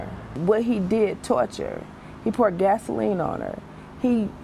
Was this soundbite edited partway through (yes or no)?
no